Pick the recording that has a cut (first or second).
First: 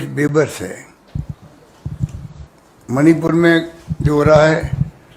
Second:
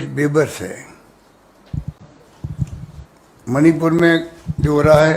first